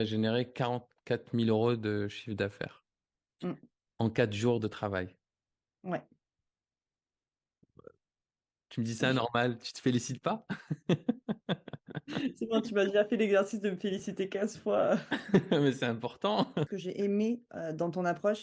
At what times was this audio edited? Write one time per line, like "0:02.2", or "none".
0:16.7